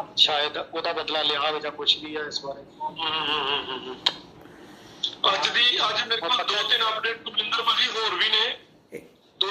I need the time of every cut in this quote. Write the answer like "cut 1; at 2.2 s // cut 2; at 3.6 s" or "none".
none